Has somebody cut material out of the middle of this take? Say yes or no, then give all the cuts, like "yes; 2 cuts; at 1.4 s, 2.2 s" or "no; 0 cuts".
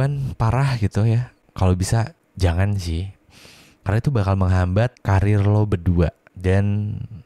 yes; 4 cuts; at 1.4 s, 2.2 s, 5.0 s, 6.3 s